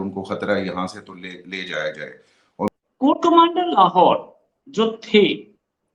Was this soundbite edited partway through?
yes; 1 cut; at 2.7 s

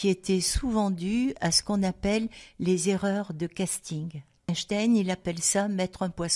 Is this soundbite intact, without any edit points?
no; 1 cut; at 4.5 s

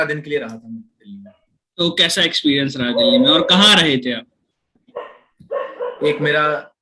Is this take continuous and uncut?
yes; 0 cuts

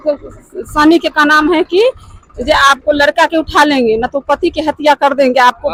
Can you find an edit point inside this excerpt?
no; 0 cuts

